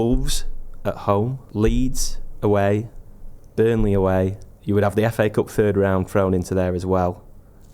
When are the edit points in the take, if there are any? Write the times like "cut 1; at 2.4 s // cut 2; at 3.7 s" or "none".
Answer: cut 1; at 1.4 s // cut 2; at 4.5 s